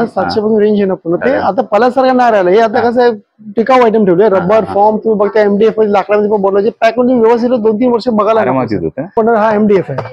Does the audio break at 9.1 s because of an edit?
yes; 2 cuts; at 1.2 s, 9.1 s

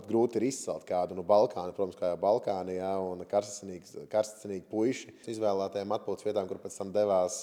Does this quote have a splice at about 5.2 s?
yes; 1 cut; at 5.2 s

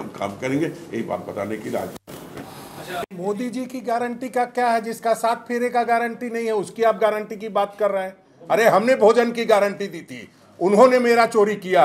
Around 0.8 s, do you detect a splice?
no; 0 cuts

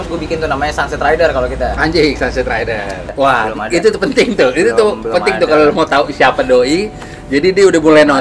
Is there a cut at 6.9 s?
no; 1 cut; at 3.0 s

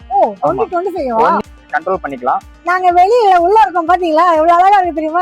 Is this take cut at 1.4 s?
yes; 1 cut; at 1.4 s

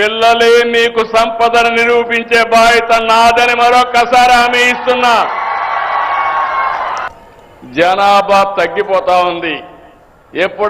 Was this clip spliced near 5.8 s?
no; 1 cut; at 8.4 s

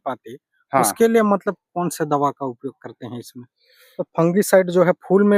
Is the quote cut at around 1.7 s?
no; 1 cut; at 3.6 s

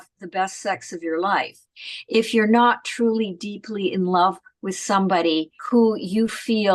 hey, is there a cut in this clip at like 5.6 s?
yes; 1 cut; at 5.6 s

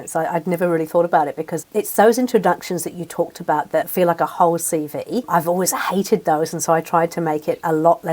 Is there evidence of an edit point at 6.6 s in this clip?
no; 3 cuts; at 1.6 s, 3.9 s, 5.3 s

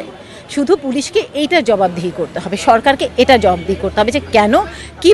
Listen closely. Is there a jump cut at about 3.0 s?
no; 0 cuts

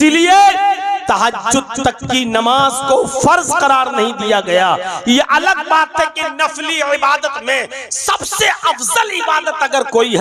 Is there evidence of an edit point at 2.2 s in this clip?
no; 0 cuts

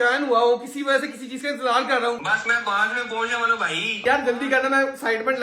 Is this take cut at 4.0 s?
yes; 2 cuts; at 2.3 s, 4.0 s

